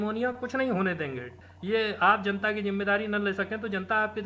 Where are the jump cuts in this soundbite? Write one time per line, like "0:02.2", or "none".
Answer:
0:01.4